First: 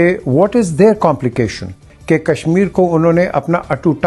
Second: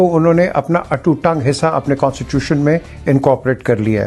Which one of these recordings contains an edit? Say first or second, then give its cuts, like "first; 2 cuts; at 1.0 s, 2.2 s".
first; 1 cut; at 1.9 s